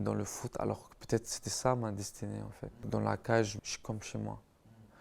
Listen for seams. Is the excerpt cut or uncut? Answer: cut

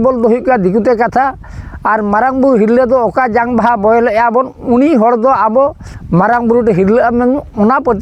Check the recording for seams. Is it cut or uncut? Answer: uncut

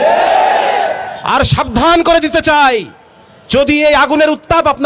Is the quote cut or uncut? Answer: uncut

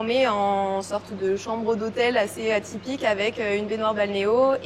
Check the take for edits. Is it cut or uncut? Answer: uncut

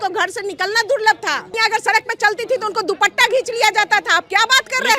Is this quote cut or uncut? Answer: cut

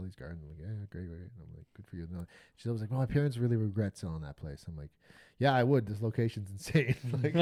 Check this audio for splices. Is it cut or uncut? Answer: uncut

